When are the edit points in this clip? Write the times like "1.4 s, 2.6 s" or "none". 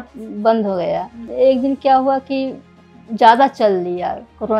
1.2 s